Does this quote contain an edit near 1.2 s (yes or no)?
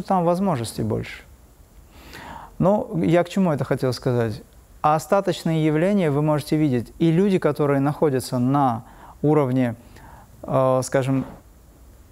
no